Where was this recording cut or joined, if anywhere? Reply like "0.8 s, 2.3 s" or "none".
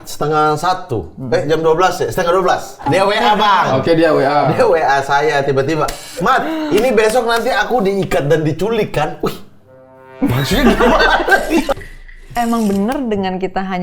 2.8 s, 4.5 s, 11.9 s

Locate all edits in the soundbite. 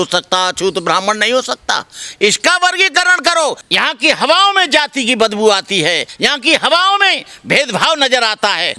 3.6 s, 6.1 s

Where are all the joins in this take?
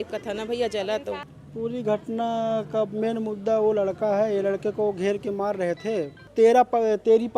1.3 s, 6.2 s

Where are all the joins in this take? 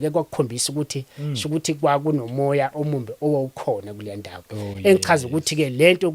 none

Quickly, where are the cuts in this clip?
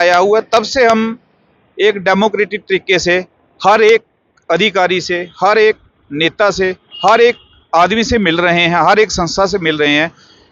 none

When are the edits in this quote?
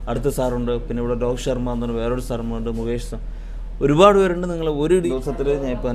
4.9 s

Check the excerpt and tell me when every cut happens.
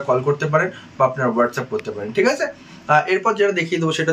none

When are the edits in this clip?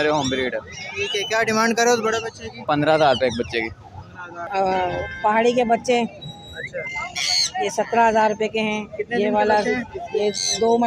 4.4 s

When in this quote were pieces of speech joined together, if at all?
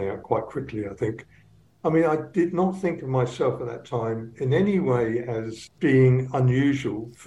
5.7 s

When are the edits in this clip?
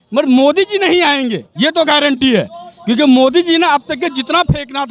none

